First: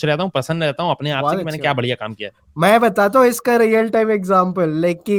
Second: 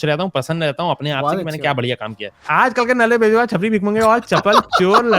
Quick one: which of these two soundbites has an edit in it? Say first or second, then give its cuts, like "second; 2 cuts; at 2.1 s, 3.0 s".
second; 1 cut; at 2.5 s